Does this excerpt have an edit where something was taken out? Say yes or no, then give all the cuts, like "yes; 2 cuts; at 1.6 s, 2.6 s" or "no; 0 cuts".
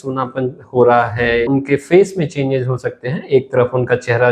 yes; 1 cut; at 1.5 s